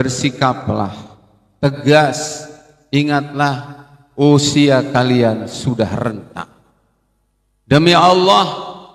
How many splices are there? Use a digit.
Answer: 0